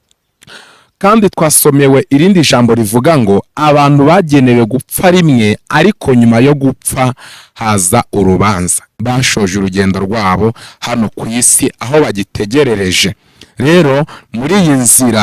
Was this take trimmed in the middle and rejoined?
yes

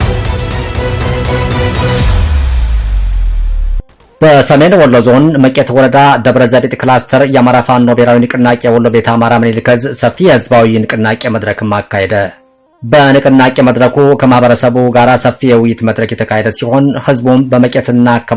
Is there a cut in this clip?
no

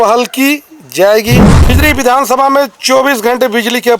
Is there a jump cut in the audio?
yes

